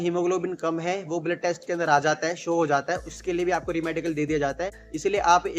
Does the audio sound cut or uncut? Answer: uncut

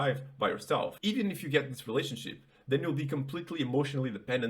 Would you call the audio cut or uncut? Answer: cut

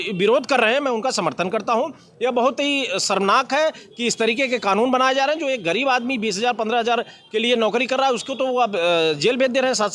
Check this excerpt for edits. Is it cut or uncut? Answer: uncut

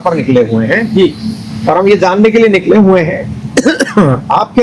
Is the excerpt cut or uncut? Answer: uncut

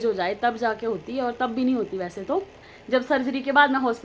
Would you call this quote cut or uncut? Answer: cut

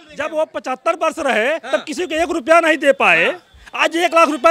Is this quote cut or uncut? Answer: uncut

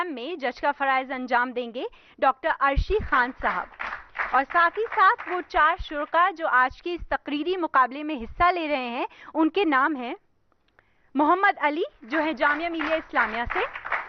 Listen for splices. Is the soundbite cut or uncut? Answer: cut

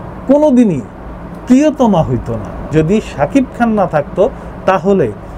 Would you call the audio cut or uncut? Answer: cut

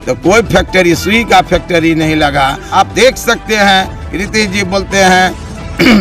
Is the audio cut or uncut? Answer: cut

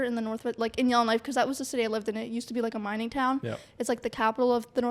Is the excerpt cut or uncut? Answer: uncut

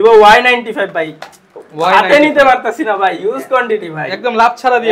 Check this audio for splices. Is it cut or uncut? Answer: uncut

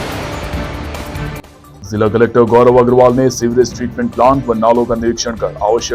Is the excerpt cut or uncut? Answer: uncut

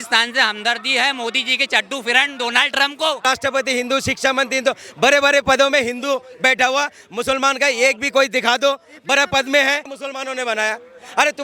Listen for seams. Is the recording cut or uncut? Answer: cut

